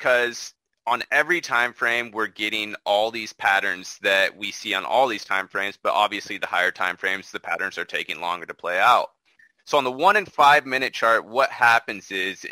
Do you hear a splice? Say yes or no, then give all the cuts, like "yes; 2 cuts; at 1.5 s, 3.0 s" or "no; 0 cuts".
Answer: no; 0 cuts